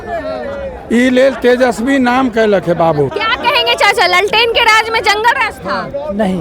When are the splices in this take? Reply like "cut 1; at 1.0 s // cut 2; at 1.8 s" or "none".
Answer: cut 1; at 3.1 s